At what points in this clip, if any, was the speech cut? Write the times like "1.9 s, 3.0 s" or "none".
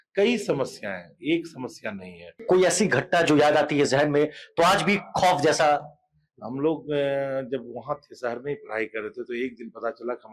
2.4 s